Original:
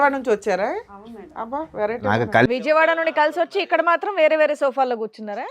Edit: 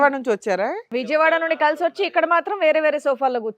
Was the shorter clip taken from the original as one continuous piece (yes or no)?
no